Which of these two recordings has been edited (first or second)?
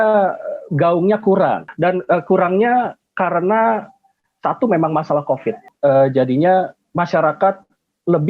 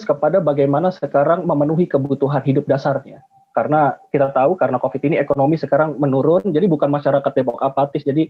first